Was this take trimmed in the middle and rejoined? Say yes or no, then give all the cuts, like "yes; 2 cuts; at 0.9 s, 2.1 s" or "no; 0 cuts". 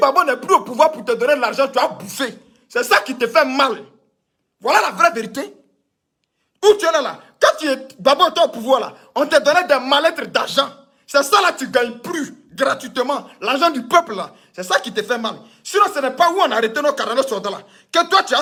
no; 0 cuts